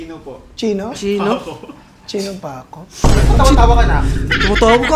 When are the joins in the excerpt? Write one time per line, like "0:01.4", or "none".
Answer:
none